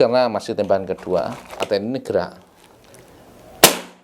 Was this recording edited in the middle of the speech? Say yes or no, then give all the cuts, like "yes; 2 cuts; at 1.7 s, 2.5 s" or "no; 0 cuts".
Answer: yes; 1 cut; at 1.6 s